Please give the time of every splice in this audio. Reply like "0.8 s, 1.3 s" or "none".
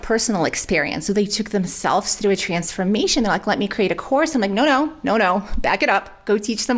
none